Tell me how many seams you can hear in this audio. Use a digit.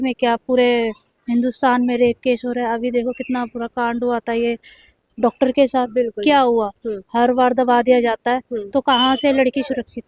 0